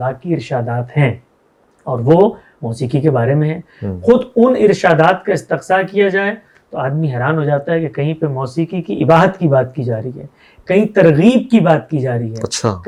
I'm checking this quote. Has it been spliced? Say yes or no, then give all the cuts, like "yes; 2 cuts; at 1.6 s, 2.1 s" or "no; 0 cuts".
no; 0 cuts